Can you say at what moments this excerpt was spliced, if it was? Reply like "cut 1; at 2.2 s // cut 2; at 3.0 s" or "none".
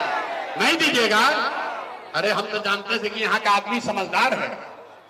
none